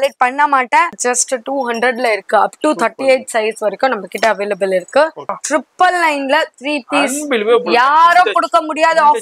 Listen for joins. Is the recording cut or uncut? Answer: cut